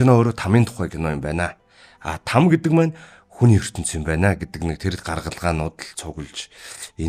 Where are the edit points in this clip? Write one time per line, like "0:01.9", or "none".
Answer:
none